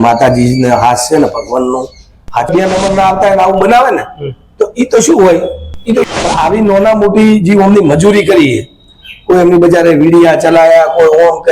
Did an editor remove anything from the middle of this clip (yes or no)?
yes